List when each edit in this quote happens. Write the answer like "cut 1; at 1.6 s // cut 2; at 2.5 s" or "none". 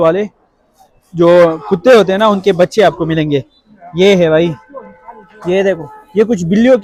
none